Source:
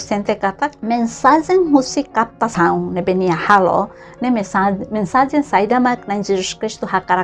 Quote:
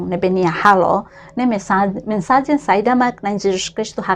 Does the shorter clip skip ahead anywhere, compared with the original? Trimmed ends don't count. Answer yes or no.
no